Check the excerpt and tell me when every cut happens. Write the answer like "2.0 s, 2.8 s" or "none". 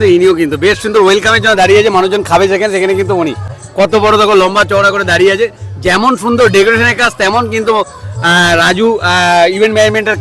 none